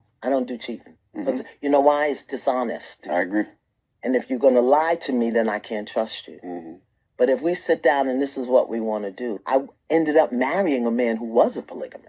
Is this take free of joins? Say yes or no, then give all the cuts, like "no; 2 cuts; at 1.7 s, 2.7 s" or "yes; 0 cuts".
yes; 0 cuts